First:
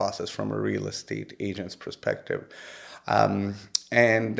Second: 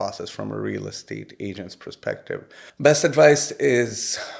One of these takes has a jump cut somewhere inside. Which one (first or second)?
second